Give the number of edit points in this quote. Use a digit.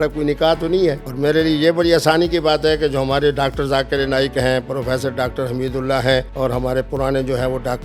2